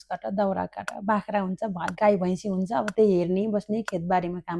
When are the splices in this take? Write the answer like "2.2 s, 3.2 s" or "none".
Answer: none

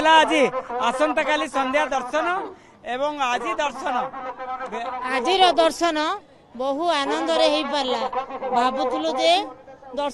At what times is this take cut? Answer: none

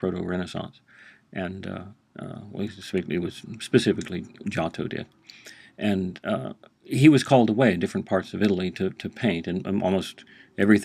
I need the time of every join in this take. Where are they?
6.6 s

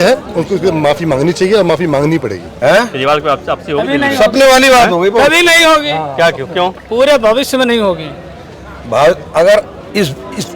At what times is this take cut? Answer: 2.5 s

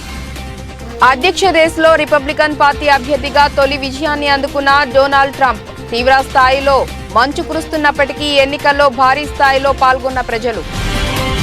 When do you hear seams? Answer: 1.0 s, 10.7 s

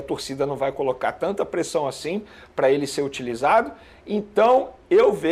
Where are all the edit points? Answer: none

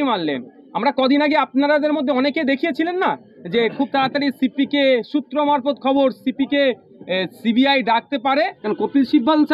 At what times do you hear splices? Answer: 8.6 s

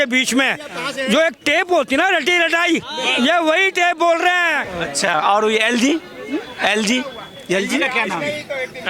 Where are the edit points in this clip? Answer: 4.7 s

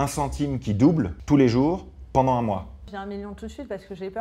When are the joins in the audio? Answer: 1.2 s, 2.9 s

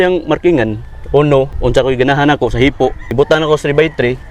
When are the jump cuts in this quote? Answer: 1.5 s, 3.0 s

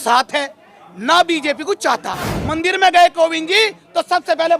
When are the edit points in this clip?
2.4 s

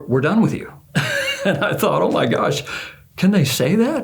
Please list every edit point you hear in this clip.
none

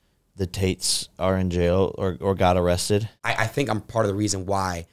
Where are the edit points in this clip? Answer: 3.2 s

